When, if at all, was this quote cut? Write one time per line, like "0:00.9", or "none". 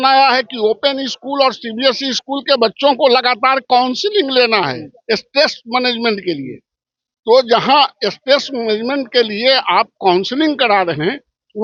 none